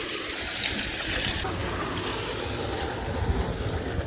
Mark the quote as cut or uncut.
cut